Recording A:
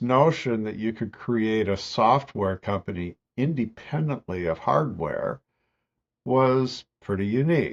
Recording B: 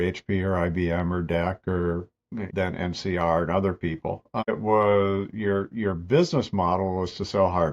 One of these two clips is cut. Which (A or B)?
B